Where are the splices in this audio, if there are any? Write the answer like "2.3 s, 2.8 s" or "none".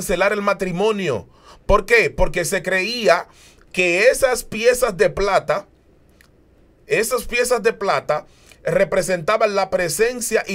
none